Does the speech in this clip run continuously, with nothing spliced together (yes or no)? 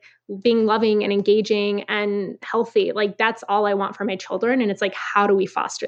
yes